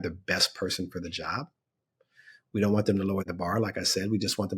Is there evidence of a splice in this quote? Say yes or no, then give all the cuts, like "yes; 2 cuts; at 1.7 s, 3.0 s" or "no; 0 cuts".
yes; 1 cut; at 3.3 s